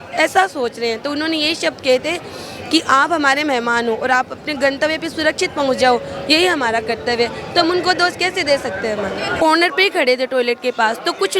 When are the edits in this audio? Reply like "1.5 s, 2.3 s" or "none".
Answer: 9.4 s